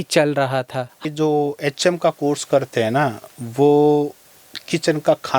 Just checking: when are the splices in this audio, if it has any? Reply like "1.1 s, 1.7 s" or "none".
1.0 s